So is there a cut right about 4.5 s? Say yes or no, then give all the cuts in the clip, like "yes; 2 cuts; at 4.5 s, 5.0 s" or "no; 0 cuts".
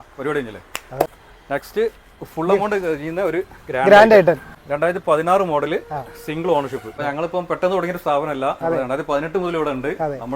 yes; 3 cuts; at 1.1 s, 4.5 s, 7.0 s